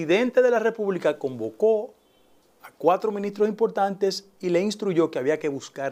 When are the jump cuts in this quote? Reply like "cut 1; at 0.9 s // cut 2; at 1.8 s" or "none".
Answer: none